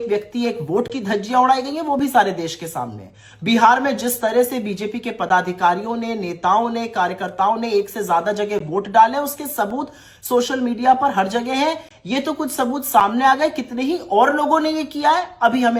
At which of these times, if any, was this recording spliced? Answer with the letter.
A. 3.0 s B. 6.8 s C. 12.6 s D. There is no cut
D